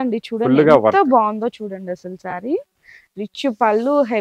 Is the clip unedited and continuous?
yes; 0 cuts

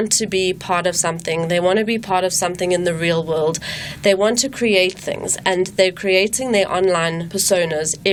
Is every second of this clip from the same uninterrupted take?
yes; 0 cuts

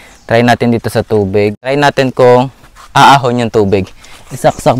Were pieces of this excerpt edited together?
yes; 1 cut; at 1.7 s

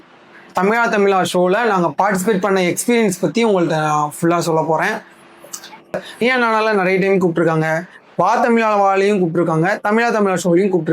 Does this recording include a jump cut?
yes; 1 cut; at 5.9 s

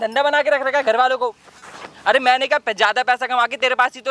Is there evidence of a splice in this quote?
no; 0 cuts

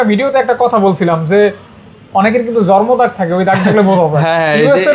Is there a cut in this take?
no; 0 cuts

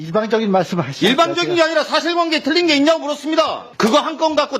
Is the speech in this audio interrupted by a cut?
yes; 1 cut; at 3.6 s

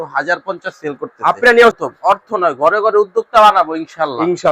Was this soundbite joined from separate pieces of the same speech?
yes; 1 cut; at 1.7 s

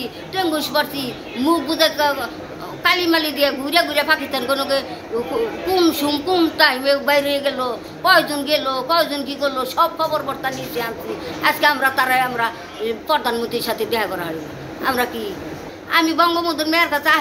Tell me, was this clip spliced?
yes; 1 cut; at 15.7 s

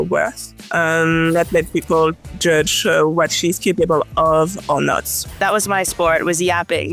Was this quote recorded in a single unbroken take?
no; 1 cut; at 5.4 s

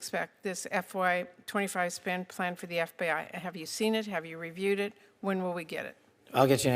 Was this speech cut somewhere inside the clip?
no; 0 cuts

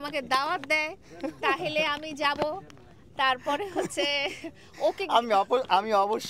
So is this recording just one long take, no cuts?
yes; 0 cuts

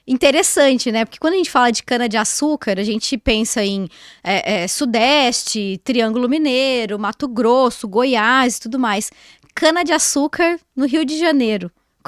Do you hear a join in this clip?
no; 0 cuts

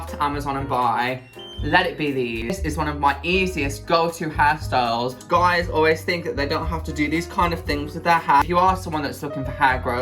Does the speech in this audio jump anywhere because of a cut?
yes; 3 cuts; at 2.4 s, 5.2 s, 8.4 s

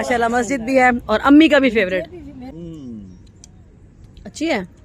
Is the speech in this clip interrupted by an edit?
yes; 1 cut; at 2.5 s

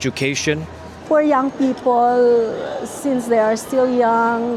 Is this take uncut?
yes; 0 cuts

